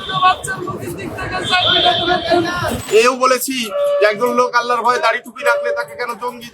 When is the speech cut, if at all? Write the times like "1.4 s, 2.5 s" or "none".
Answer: 2.8 s

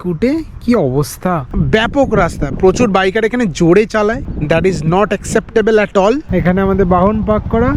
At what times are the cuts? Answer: 1.5 s, 6.3 s

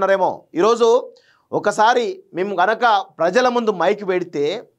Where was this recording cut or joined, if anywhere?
none

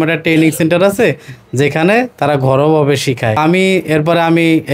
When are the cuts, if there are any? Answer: 3.4 s

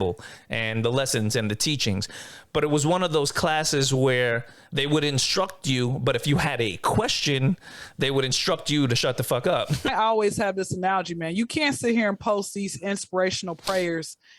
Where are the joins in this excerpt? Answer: 9.9 s

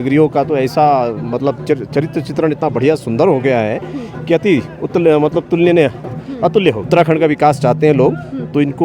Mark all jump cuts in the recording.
6.8 s

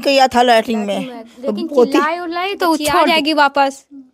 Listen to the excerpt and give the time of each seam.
3.1 s

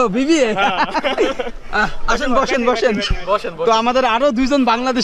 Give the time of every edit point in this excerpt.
none

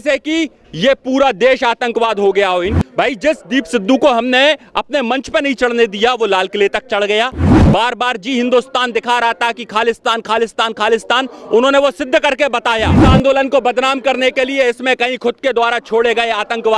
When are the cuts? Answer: 2.7 s, 7.5 s, 13.0 s

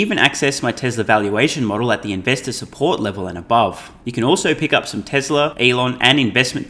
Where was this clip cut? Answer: 3.9 s, 5.5 s

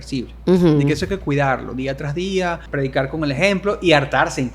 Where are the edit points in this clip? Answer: 2.6 s

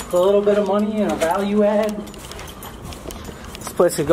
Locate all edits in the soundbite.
none

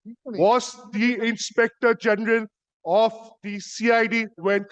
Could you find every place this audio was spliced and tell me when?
none

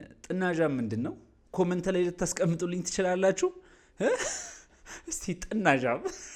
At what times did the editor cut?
none

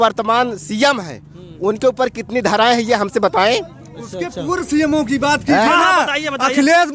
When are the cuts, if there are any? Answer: none

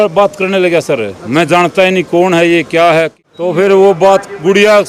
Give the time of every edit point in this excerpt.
3.2 s

